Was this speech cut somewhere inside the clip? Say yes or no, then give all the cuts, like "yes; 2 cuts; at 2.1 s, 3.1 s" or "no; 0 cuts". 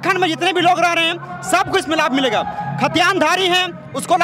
no; 0 cuts